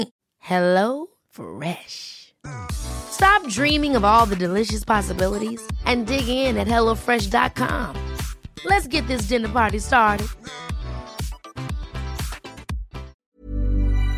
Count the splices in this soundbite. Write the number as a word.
one